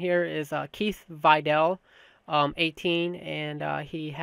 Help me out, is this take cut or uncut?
cut